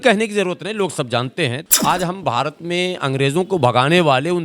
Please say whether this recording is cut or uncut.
cut